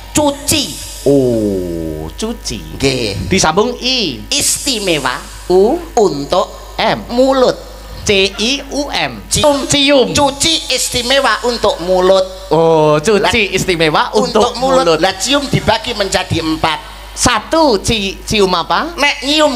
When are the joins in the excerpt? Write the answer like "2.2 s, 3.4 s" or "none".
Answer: 9.4 s